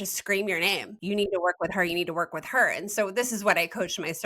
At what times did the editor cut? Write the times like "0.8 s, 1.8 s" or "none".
0.9 s